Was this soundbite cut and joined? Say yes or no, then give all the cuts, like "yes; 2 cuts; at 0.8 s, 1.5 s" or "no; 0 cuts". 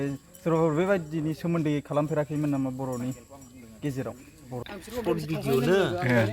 yes; 1 cut; at 4.7 s